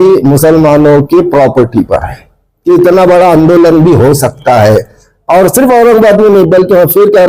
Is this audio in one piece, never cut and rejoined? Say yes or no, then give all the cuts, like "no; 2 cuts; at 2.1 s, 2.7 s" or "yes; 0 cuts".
no; 1 cut; at 2.5 s